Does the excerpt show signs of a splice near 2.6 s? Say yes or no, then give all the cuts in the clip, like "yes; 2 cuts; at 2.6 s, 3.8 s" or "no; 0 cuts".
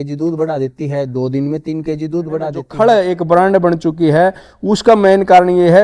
yes; 1 cut; at 2.6 s